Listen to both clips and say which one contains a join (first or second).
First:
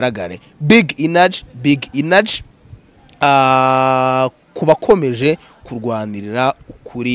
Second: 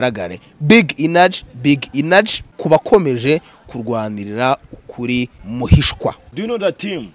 second